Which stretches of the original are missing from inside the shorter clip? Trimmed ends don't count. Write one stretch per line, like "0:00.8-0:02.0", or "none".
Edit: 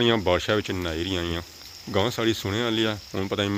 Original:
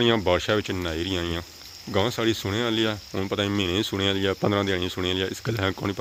none

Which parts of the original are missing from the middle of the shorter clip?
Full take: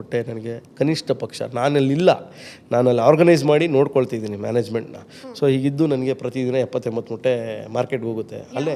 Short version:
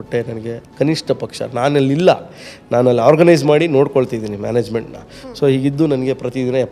none

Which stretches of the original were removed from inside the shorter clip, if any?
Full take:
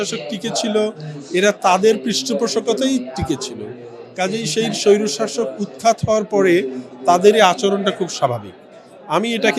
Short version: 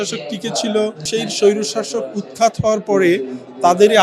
0:01.0-0:04.5

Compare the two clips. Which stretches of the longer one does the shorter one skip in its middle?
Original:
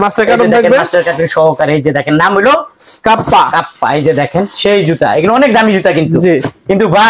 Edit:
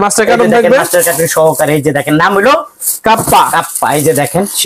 none

